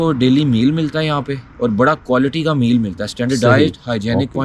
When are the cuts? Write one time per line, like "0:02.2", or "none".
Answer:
none